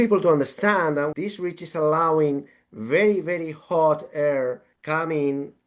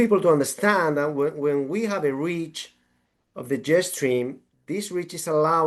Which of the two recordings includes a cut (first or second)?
first